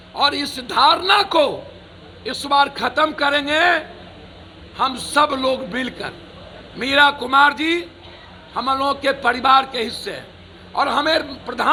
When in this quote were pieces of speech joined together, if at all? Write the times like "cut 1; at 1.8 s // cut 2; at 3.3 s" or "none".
none